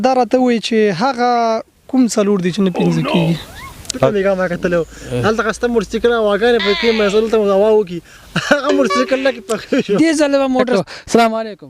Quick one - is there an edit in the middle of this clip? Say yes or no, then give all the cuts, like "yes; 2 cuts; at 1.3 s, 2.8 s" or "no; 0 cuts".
yes; 2 cuts; at 4.0 s, 10.7 s